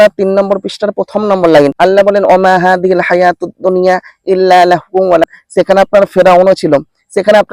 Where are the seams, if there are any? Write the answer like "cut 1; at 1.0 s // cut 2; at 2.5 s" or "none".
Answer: cut 1; at 1.7 s // cut 2; at 5.3 s